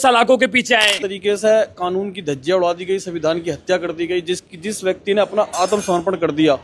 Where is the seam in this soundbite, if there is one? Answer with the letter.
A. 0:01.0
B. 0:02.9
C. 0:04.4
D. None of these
A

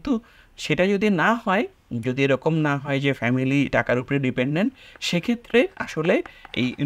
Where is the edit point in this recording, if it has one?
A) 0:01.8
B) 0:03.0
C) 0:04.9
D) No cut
D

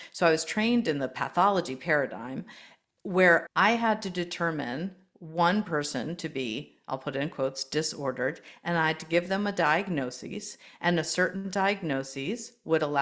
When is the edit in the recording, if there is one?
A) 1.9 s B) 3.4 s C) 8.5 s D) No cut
B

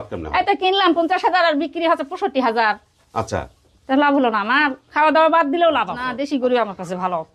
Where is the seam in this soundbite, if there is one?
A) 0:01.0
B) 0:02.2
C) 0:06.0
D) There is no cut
C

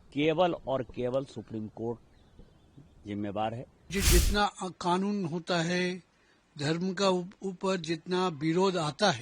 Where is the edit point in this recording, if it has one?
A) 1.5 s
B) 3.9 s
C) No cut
B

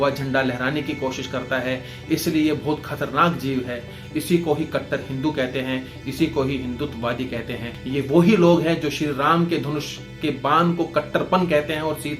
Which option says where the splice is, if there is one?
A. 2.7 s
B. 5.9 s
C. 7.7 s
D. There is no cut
C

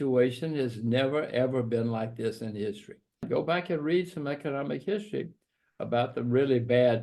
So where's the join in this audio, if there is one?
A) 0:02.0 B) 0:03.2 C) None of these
B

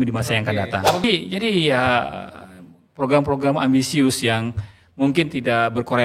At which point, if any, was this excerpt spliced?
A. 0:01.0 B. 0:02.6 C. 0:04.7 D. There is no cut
A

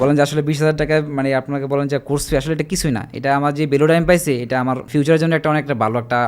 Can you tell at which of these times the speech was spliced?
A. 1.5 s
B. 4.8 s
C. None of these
B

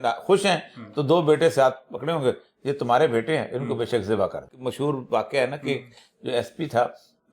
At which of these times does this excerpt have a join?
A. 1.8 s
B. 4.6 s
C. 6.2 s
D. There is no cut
B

